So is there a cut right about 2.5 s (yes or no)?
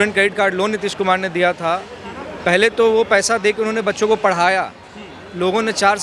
no